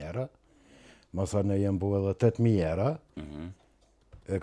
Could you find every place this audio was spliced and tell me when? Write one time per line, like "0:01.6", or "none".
0:03.1